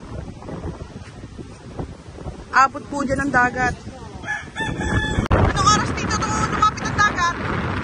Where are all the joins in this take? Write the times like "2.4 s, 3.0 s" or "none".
5.3 s